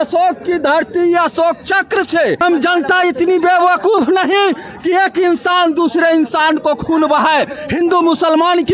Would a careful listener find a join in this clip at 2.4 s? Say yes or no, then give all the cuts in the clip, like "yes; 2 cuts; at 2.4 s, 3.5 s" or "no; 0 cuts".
yes; 1 cut; at 2.4 s